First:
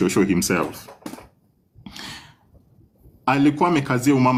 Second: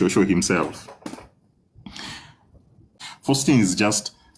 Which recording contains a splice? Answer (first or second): second